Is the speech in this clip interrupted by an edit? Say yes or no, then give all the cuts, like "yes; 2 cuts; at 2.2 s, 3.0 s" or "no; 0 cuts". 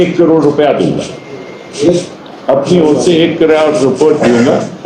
no; 0 cuts